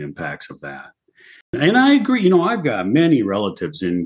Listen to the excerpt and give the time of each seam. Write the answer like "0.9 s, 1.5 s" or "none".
1.5 s